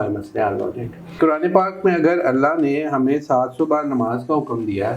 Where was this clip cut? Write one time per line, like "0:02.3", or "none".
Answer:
0:01.2

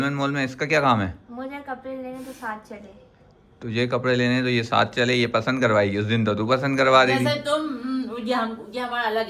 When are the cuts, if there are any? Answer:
none

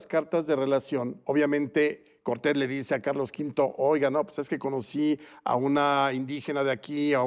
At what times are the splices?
none

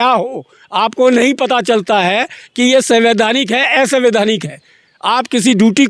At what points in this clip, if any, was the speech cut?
none

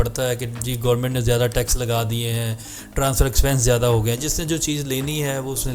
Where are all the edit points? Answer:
none

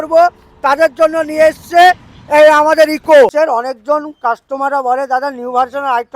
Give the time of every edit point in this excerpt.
0:03.3

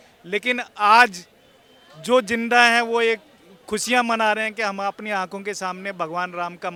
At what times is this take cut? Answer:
none

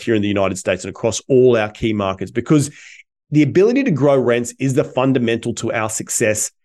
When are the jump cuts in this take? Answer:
none

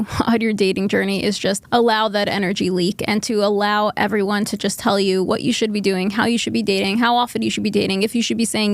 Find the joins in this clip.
0:01.6

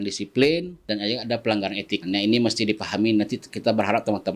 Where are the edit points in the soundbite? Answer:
0:00.8
0:02.0

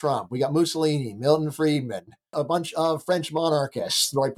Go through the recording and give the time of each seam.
0:02.3

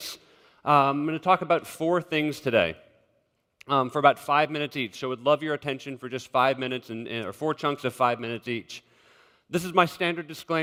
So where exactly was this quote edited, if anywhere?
none

